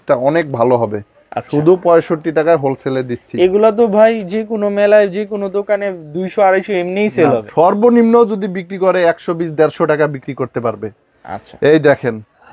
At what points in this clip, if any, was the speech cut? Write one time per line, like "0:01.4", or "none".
none